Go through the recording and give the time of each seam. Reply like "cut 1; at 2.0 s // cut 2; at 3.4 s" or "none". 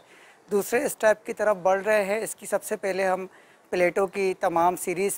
none